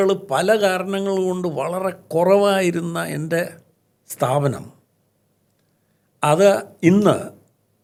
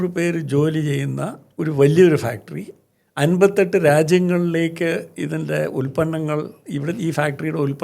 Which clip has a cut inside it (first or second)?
second